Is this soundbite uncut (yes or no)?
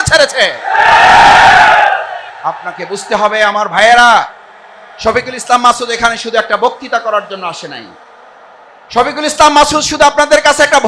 no